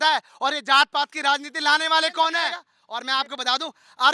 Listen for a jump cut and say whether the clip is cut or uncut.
cut